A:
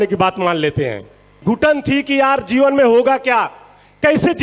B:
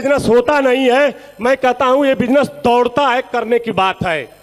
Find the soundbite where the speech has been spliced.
A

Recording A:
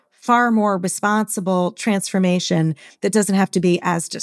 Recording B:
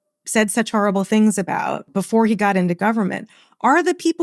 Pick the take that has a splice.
B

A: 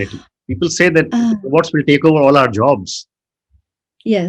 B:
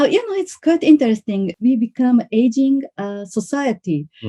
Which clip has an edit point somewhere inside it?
B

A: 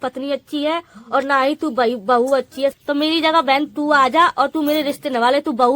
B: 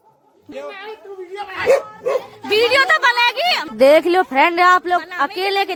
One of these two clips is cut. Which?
A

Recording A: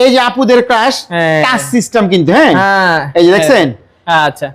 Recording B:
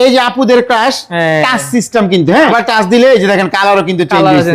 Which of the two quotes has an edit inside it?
B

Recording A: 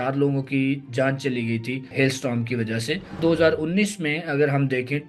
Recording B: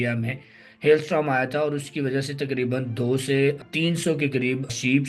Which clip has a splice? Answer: A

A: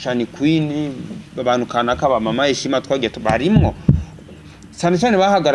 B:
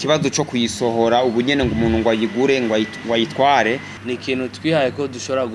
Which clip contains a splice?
B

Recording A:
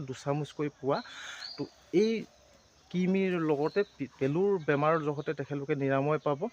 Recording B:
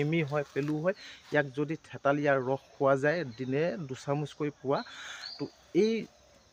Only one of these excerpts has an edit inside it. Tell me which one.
A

